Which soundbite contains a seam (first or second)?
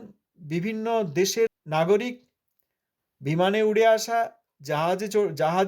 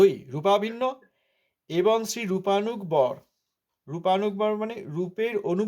first